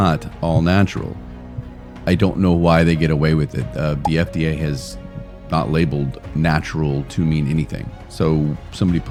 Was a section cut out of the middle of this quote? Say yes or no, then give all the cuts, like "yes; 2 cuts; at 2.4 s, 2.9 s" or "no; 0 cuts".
no; 0 cuts